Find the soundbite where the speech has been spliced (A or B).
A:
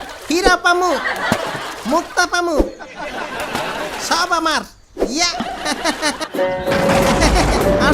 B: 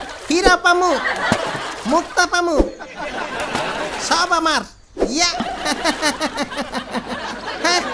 A